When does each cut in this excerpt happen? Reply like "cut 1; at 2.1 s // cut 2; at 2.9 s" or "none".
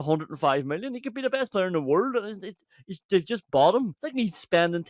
cut 1; at 4.0 s